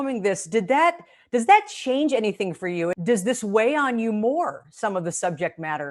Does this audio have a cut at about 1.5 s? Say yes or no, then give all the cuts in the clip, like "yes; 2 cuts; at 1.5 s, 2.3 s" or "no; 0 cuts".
no; 1 cut; at 2.9 s